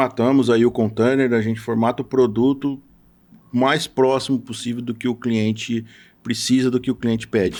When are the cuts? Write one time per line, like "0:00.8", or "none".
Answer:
none